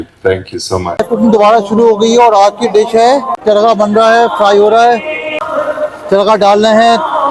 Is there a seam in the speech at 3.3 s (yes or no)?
yes